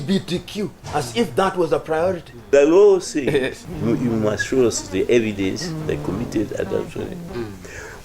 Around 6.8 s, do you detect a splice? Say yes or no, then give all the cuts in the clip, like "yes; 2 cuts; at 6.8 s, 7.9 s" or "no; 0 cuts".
no; 2 cuts; at 2.3 s, 3.6 s